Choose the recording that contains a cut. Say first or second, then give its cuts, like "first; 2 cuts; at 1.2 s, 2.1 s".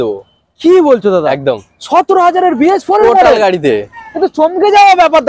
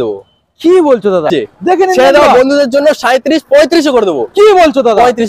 second; 1 cut; at 1.3 s